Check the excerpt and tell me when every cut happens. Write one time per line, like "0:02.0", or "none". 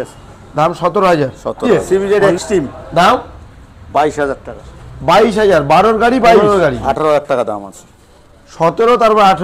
0:01.7
0:06.4